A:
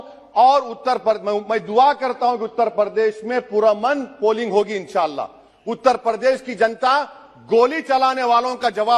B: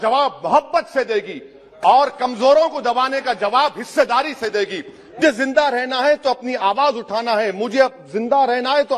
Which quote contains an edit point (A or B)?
B